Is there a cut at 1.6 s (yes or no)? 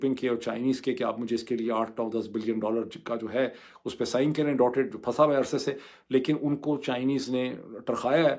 no